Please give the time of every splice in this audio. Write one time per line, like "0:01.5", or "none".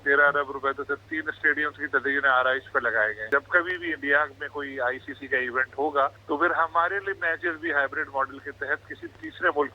0:01.1
0:03.2
0:06.2